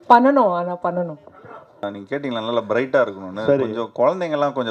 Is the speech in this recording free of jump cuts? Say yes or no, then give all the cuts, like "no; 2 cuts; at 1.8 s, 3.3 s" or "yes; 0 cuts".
no; 1 cut; at 1.8 s